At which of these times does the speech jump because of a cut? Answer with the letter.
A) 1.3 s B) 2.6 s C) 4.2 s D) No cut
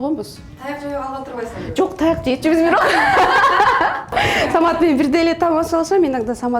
C